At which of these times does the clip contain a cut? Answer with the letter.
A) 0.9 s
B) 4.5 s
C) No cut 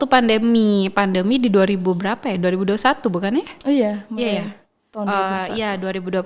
C